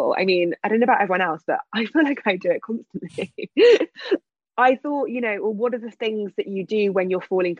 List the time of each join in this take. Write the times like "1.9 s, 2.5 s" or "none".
4.2 s